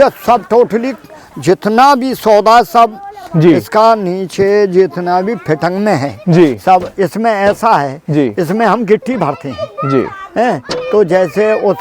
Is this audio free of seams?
yes; 0 cuts

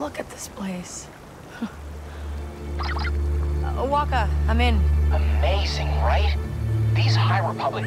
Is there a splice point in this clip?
no; 0 cuts

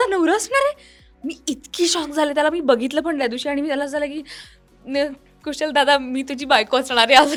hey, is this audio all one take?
yes; 0 cuts

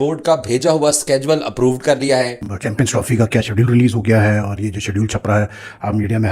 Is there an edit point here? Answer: yes; 1 cut; at 2.4 s

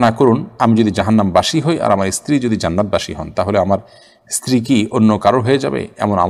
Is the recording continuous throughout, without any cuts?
yes; 0 cuts

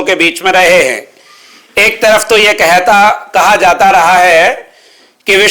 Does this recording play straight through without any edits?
yes; 0 cuts

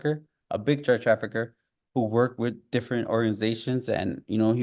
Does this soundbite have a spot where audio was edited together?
no; 0 cuts

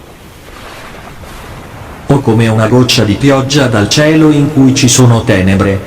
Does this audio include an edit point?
yes; 1 cut; at 2.1 s

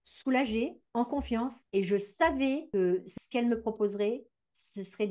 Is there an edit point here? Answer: yes; 2 cuts; at 1.3 s, 2.6 s

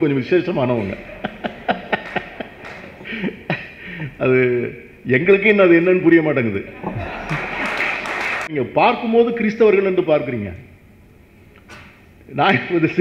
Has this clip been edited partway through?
yes; 1 cut; at 8.5 s

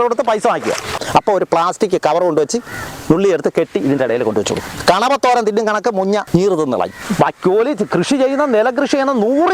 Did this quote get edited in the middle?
yes; 4 cuts; at 1.0 s, 4.7 s, 6.3 s, 7.0 s

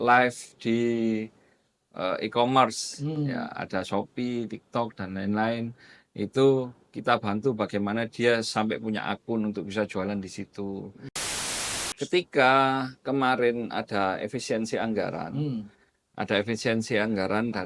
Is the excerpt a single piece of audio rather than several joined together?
no; 1 cut; at 11.4 s

